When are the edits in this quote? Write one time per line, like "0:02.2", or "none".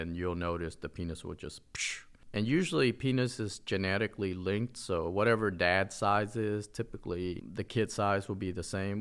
0:02.0
0:07.4